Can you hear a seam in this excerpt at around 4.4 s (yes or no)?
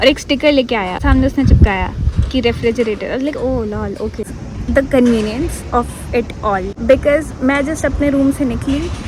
yes